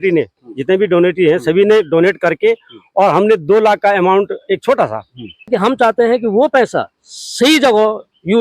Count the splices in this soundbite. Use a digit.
1